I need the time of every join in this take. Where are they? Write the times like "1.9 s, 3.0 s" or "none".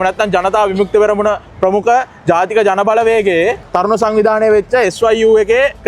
3.7 s